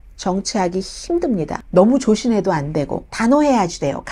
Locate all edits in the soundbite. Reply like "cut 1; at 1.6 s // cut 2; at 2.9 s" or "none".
cut 1; at 1.5 s // cut 2; at 3.0 s